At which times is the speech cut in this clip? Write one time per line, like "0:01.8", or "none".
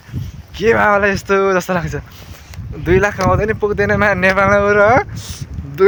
none